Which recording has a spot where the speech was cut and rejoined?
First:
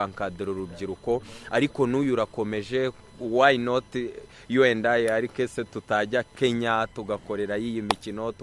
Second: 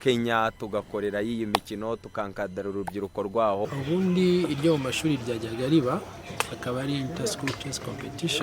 second; 1 cut; at 3.6 s

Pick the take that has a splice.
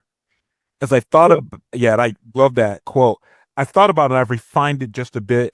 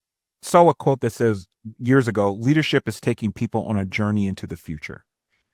first; 1 cut; at 2.8 s

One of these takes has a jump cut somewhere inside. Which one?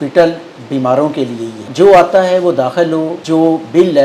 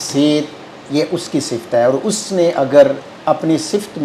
first; 2 cuts; at 1.7 s, 3.2 s

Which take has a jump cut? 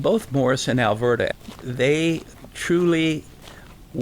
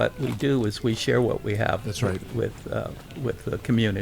first; 2 cuts; at 1.3 s, 2.3 s

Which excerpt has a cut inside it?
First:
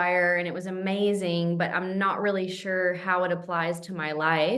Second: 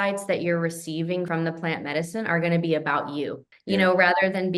second; 2 cuts; at 1.3 s, 3.5 s

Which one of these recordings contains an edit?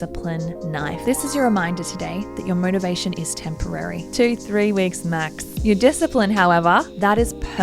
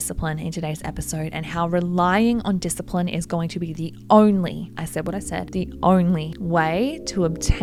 first; 2 cuts; at 1.0 s, 5.5 s

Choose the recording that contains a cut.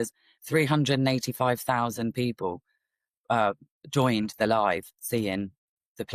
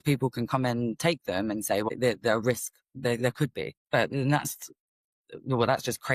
second; 2 cuts; at 1.9 s, 3.8 s

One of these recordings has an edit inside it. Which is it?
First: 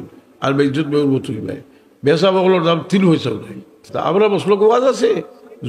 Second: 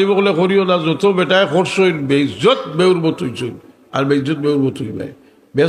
first; 1 cut; at 3.9 s

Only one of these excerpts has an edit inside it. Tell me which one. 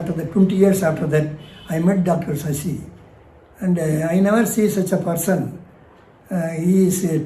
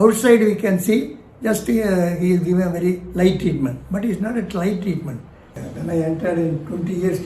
second; 1 cut; at 5.6 s

